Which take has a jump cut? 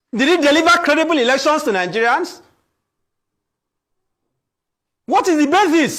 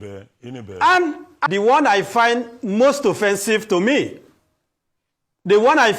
second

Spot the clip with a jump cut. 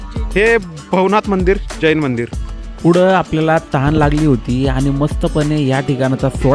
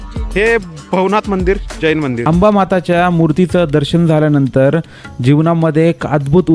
second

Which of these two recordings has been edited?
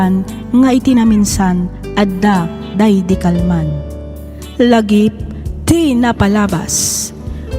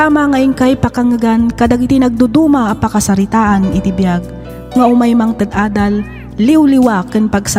first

